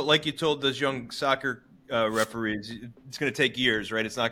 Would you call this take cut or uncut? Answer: uncut